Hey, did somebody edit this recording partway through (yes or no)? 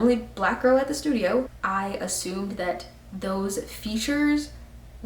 yes